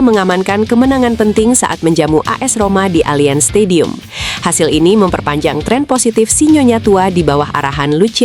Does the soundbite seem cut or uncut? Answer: uncut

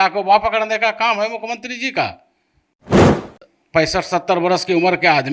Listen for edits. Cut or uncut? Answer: uncut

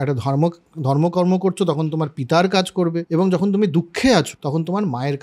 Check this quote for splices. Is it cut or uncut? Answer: cut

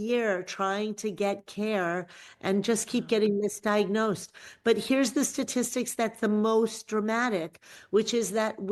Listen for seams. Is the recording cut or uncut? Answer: uncut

